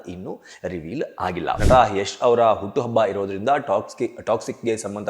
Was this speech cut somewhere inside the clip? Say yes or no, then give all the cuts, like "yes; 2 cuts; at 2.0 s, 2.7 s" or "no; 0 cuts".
yes; 1 cut; at 1.6 s